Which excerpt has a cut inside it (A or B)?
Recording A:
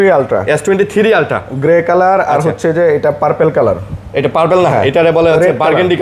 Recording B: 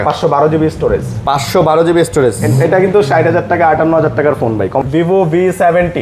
B